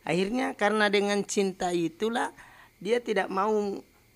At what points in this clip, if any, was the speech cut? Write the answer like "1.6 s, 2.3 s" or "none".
none